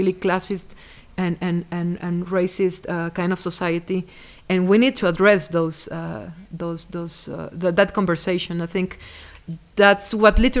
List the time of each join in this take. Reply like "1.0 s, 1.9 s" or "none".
none